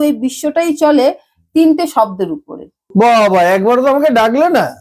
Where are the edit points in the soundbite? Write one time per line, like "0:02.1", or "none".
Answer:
0:02.9